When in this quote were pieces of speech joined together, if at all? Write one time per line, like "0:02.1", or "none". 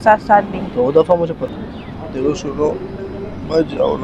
0:01.4